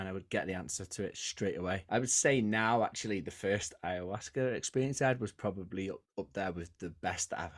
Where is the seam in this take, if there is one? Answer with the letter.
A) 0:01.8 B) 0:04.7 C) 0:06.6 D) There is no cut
A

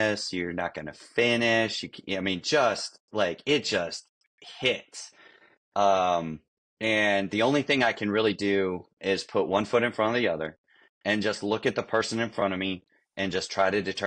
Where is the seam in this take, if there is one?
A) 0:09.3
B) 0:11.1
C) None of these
C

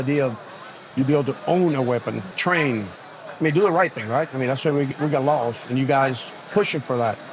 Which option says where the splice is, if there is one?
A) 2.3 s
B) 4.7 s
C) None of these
A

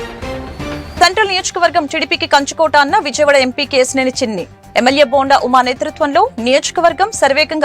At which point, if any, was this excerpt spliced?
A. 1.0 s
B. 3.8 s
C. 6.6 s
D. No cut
A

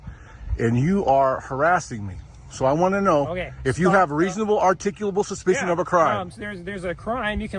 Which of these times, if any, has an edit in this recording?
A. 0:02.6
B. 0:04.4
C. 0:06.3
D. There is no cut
D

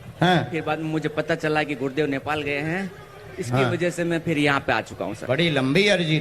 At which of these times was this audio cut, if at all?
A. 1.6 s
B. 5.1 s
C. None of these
B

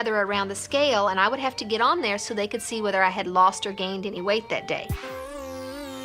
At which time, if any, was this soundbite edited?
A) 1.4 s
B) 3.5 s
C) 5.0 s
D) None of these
C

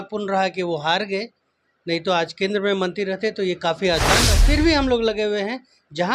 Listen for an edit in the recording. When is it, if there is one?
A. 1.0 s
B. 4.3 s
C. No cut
B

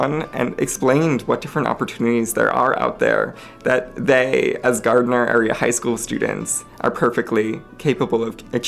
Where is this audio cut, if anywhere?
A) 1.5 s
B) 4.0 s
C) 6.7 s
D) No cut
D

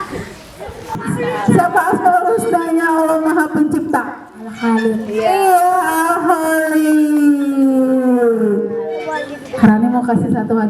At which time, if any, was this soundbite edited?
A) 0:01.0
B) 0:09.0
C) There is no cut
A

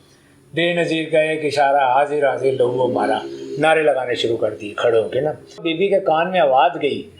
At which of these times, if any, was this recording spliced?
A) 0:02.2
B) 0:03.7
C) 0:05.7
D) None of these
C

